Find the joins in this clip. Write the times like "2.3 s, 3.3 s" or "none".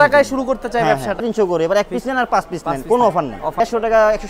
1.2 s, 3.6 s